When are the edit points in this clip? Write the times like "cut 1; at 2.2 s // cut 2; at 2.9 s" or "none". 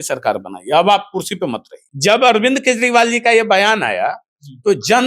cut 1; at 1.9 s